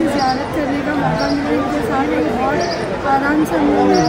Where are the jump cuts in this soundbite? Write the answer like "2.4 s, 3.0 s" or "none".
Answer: none